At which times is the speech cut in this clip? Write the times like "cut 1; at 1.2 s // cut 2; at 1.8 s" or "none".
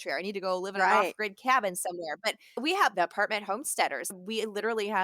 cut 1; at 2.6 s // cut 2; at 4.1 s

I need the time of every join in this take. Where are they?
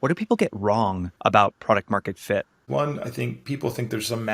cut 1; at 1.1 s // cut 2; at 2.6 s

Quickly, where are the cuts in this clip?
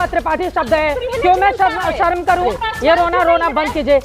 cut 1; at 2.5 s

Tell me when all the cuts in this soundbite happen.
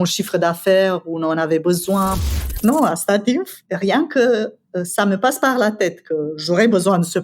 cut 1; at 2.2 s // cut 2; at 3.6 s

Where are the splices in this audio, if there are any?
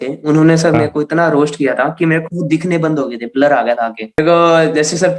cut 1; at 4.2 s

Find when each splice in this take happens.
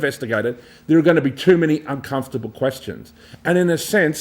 none

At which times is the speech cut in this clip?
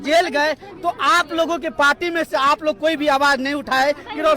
none

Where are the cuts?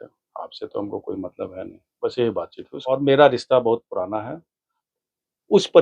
cut 1; at 2.7 s

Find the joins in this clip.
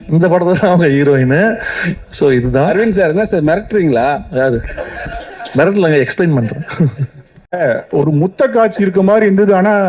cut 1; at 7.4 s

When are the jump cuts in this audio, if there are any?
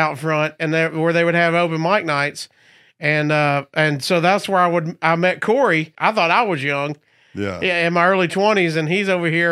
cut 1; at 5.9 s

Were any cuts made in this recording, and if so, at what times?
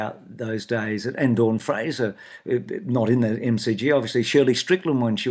none

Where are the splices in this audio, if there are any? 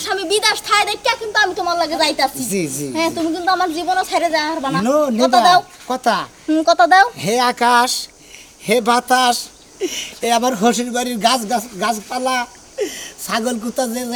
none

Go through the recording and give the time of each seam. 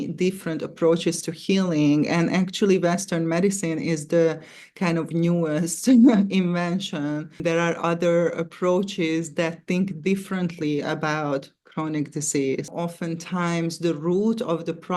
cut 1; at 7.4 s // cut 2; at 12.7 s

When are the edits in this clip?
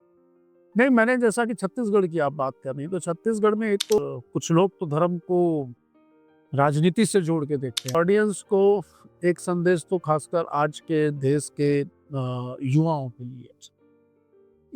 cut 1; at 4.0 s // cut 2; at 7.9 s

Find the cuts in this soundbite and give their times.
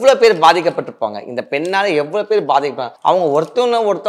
cut 1; at 2.9 s

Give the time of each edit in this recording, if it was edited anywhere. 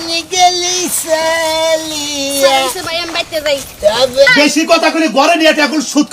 cut 1; at 4.3 s

